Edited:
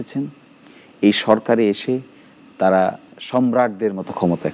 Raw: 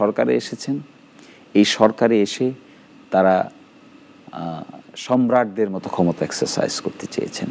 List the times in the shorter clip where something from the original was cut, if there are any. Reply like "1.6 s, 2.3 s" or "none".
3.1 s